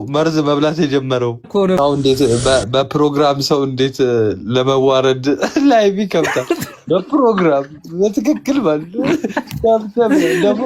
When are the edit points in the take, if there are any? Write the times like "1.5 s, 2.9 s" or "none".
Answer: 1.8 s

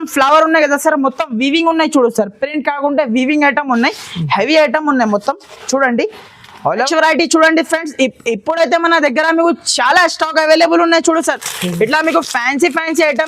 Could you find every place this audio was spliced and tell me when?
6.8 s

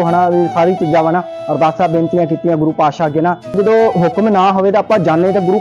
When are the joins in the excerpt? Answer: 3.5 s

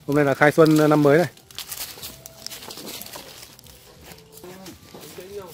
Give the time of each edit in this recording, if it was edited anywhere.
4.4 s

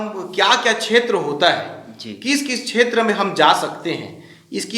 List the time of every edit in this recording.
none

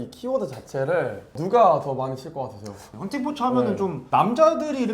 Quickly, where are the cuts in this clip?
1.3 s, 2.8 s, 4.0 s

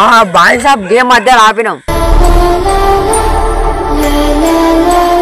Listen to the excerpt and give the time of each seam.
none

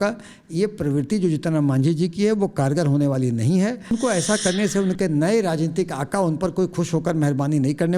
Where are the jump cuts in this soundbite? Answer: 3.9 s

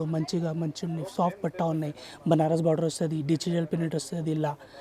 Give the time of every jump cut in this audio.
none

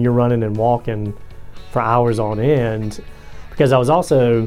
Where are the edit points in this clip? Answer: 3.0 s

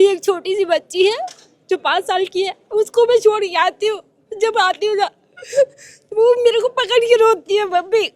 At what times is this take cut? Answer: none

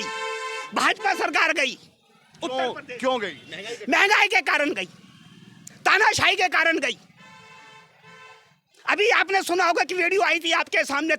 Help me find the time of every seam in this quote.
none

